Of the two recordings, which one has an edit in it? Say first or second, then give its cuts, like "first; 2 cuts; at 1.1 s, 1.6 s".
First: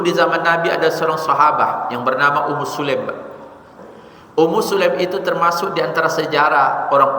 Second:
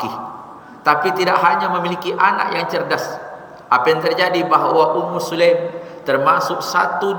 first; 1 cut; at 3.7 s